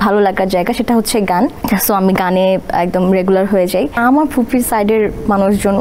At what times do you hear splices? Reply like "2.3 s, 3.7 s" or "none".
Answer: 1.6 s, 4.0 s